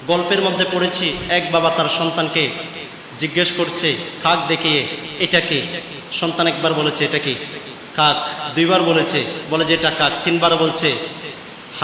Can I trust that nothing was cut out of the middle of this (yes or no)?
no